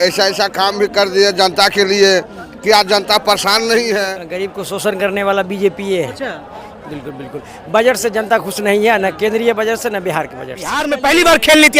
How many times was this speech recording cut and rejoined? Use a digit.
2